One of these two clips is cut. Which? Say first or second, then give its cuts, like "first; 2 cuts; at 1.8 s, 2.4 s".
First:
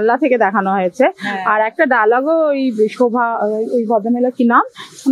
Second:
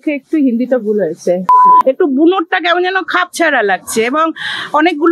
second; 1 cut; at 1.6 s